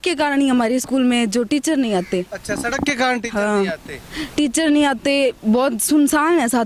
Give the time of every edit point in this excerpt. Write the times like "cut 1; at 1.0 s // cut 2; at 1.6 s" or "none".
none